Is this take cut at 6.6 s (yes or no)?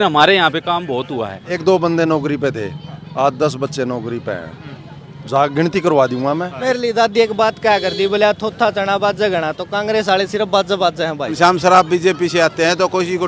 yes